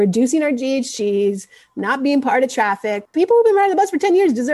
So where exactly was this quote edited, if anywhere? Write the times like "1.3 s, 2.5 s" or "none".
3.0 s

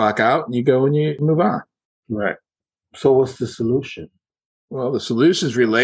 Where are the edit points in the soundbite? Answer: 1.2 s

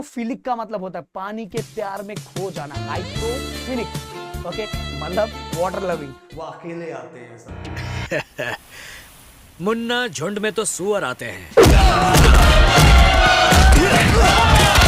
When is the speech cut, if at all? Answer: 6.2 s

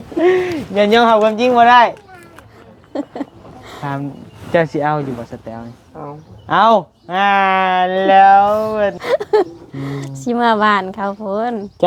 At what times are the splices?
9.0 s

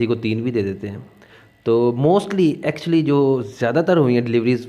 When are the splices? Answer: none

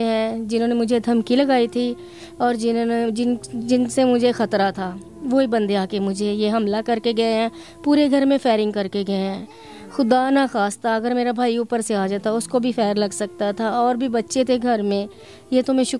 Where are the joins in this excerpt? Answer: none

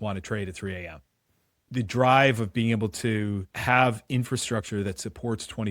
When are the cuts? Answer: 1.7 s, 3.5 s

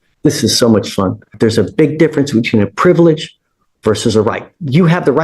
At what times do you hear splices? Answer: 1.3 s

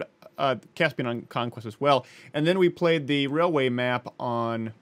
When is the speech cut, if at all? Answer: none

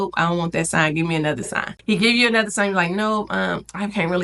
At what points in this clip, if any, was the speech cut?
1.6 s

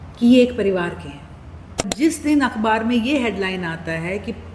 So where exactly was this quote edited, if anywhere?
1.8 s

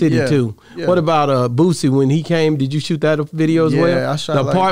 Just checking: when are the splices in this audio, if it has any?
none

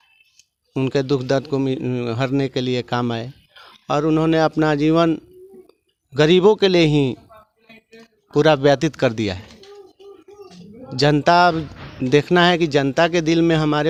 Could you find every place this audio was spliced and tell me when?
none

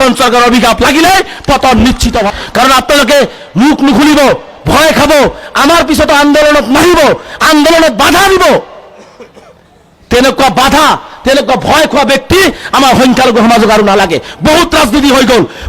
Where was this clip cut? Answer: 2.3 s

